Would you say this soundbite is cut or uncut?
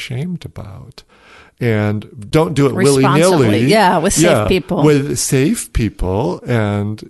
cut